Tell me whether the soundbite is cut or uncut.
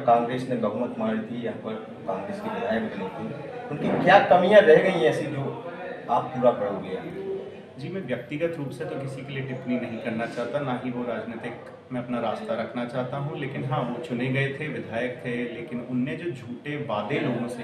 uncut